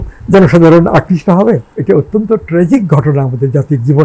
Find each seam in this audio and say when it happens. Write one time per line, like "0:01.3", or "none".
0:01.7

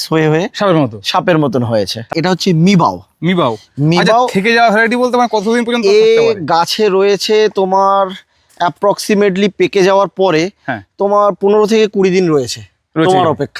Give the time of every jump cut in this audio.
0:02.1

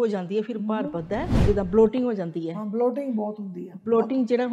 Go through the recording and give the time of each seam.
0:01.4

